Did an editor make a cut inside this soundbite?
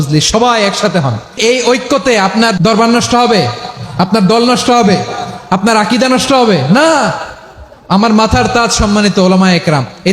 yes; 2 cuts; at 1.2 s, 2.6 s

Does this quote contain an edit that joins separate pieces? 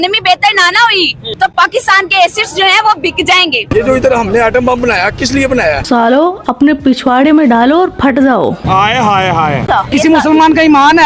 yes; 4 cuts; at 1.2 s, 3.7 s, 5.8 s, 9.6 s

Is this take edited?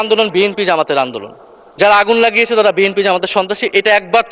no; 0 cuts

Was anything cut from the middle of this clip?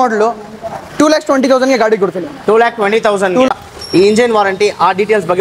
yes; 1 cut; at 3.5 s

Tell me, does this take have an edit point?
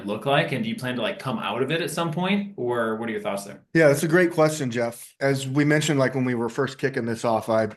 yes; 2 cuts; at 3.5 s, 5.0 s

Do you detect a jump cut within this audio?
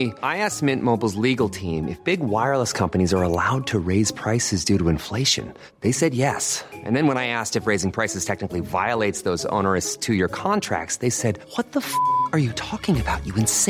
no; 0 cuts

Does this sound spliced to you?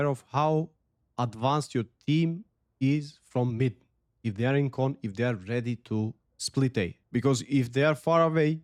no; 0 cuts

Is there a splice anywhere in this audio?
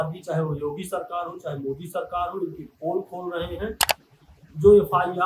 yes; 1 cut; at 3.9 s

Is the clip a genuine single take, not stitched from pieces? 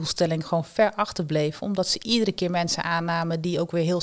yes; 0 cuts

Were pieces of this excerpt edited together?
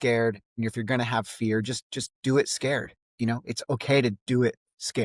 no; 0 cuts

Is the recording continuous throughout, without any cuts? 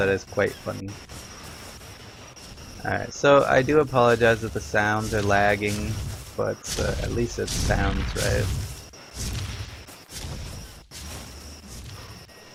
yes; 0 cuts

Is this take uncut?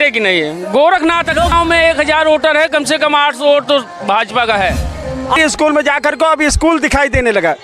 no; 2 cuts; at 1.5 s, 5.4 s

